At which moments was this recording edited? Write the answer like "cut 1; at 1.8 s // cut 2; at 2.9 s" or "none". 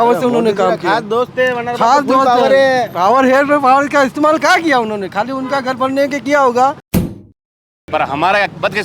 cut 1; at 7.2 s